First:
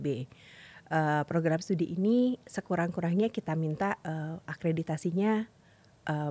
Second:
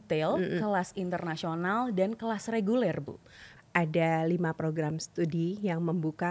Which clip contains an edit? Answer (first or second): second